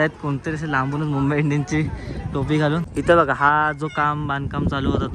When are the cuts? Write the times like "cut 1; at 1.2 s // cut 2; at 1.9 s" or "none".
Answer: cut 1; at 2.9 s